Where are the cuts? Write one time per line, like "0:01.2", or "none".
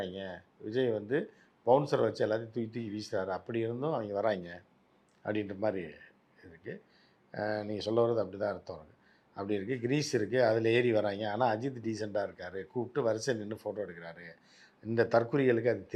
none